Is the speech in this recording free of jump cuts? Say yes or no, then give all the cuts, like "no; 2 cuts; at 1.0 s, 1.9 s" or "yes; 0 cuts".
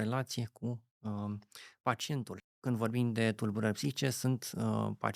no; 1 cut; at 2.4 s